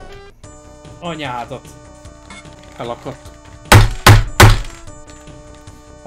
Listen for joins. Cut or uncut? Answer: cut